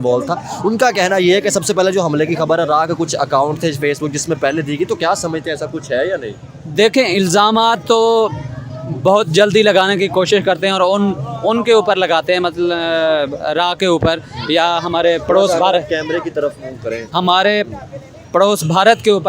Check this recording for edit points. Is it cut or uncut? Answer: uncut